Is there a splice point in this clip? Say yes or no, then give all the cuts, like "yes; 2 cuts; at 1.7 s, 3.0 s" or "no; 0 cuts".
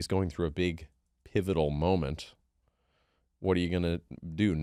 no; 0 cuts